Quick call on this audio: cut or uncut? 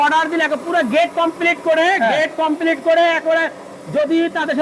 uncut